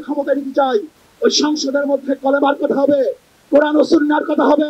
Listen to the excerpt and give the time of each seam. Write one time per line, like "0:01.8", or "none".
0:01.0